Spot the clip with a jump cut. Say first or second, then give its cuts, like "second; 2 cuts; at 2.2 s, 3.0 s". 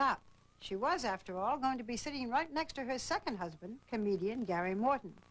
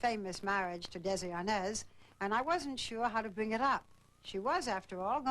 first; 1 cut; at 3.2 s